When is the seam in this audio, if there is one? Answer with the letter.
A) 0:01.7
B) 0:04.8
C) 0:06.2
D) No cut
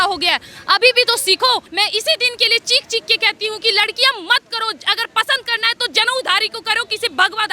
A